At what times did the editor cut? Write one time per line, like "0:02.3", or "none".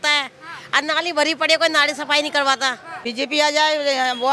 0:02.9